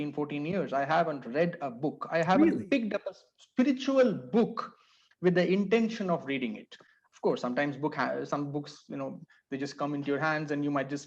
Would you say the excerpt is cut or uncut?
uncut